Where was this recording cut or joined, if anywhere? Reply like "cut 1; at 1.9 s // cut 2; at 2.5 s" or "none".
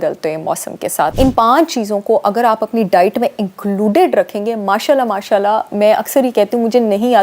cut 1; at 1.3 s

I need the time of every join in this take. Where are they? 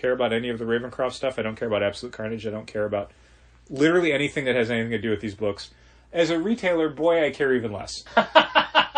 cut 1; at 8.0 s

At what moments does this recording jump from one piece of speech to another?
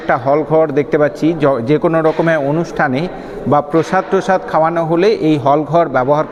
none

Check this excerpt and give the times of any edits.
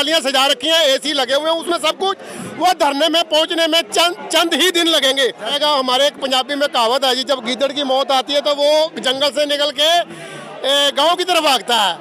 cut 1; at 5.5 s

